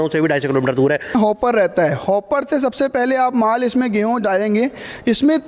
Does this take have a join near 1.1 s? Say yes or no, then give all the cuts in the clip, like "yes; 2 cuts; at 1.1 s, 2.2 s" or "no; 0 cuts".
yes; 1 cut; at 1.1 s